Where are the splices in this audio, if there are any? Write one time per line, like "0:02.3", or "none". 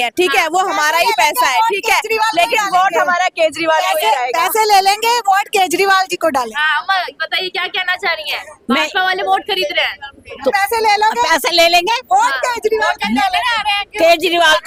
none